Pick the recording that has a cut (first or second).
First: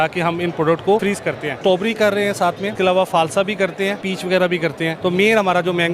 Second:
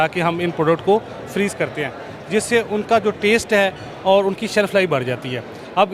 first